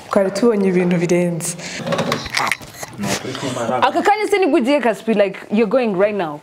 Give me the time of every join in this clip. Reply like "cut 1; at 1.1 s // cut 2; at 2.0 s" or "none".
cut 1; at 1.8 s